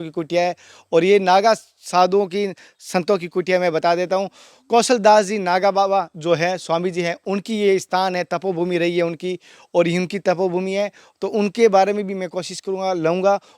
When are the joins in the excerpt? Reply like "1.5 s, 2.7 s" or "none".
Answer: none